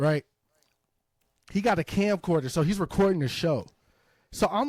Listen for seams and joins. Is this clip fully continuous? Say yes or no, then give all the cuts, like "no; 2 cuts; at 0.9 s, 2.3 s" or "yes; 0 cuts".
yes; 0 cuts